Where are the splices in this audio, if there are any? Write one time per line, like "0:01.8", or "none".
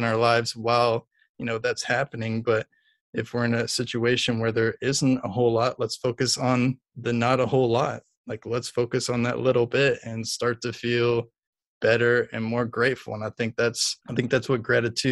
0:13.9